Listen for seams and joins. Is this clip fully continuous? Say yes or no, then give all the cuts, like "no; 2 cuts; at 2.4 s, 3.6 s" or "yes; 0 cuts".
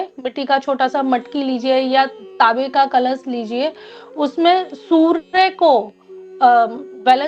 yes; 0 cuts